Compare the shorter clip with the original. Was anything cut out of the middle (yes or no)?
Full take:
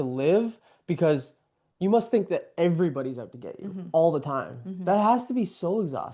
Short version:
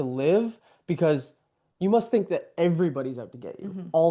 no